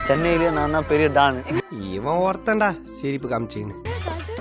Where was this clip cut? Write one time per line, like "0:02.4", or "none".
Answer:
0:01.5